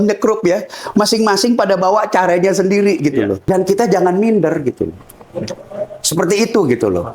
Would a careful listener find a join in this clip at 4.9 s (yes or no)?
no